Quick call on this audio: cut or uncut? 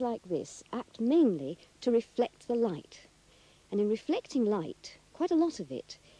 cut